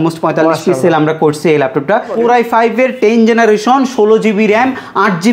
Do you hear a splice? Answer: yes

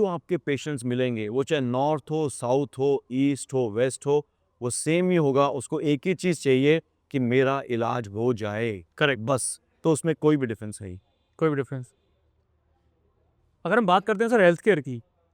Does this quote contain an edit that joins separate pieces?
no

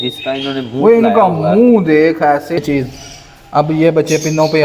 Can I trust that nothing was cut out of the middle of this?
no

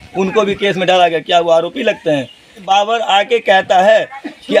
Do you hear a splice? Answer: yes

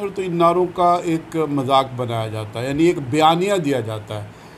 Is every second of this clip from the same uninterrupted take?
yes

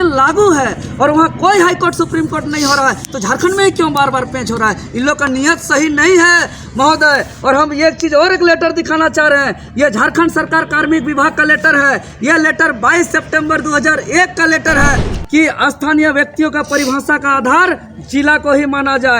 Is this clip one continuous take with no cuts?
no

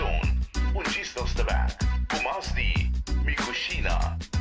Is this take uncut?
yes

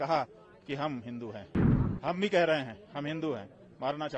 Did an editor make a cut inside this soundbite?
no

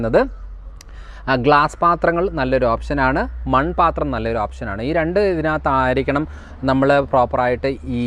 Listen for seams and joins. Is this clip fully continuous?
yes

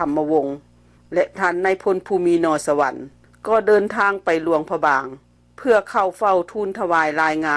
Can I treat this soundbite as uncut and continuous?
no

